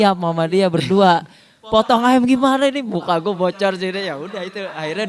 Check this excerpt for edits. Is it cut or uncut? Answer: uncut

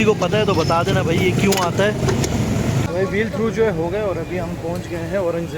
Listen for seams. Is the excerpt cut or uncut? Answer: uncut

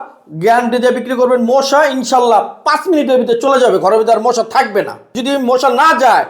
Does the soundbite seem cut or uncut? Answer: cut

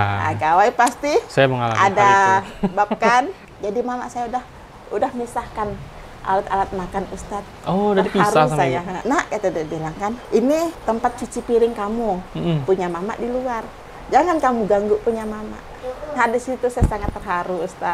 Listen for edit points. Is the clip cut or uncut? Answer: cut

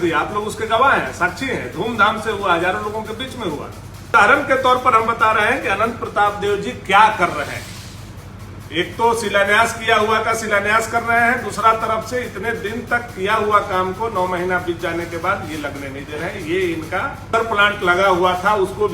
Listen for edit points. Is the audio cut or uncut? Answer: cut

